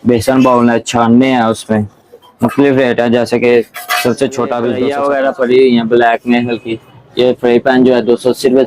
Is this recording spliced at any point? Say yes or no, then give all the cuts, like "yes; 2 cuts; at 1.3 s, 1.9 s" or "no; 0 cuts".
yes; 1 cut; at 4.8 s